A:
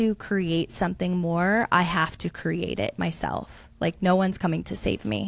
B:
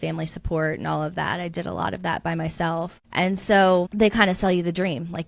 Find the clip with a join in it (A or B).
B